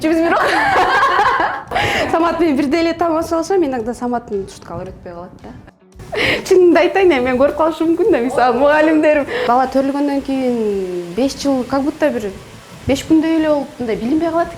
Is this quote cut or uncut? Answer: cut